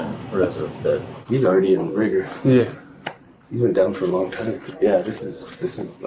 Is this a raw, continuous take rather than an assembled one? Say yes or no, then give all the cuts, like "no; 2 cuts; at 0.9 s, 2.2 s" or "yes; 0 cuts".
no; 2 cuts; at 1.1 s, 4.6 s